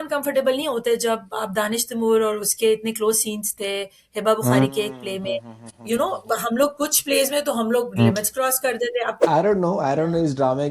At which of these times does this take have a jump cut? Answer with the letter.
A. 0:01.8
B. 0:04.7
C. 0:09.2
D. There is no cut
C